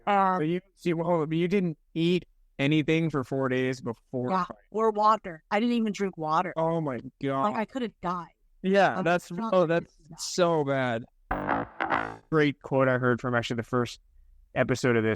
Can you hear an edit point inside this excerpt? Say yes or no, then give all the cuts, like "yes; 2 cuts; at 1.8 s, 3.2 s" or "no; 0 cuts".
yes; 1 cut; at 11.6 s